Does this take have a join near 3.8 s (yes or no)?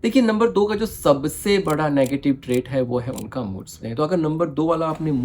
yes